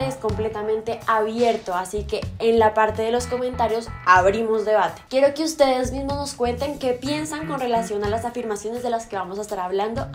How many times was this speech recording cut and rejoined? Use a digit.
0